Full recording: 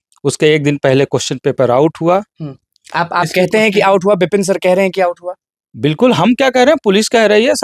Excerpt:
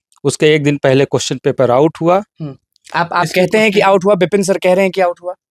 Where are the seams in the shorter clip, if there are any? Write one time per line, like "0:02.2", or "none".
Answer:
none